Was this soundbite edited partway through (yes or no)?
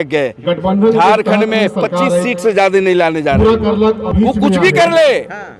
yes